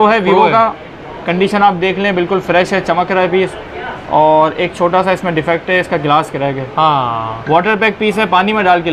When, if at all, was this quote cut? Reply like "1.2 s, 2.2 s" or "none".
none

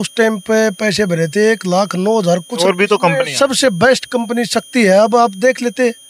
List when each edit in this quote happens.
2.6 s

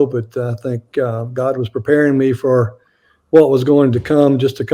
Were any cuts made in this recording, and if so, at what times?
none

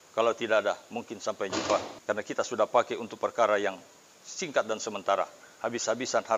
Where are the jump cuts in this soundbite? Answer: 1.9 s

